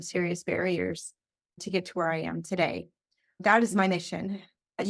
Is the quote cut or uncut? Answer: uncut